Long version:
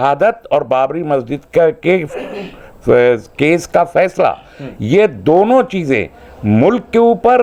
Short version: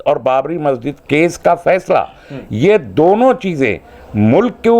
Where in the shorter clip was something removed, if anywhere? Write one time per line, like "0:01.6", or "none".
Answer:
0:01.0